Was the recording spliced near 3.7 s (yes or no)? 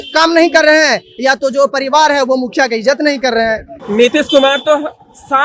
yes